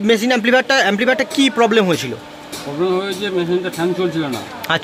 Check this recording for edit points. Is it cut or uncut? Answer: uncut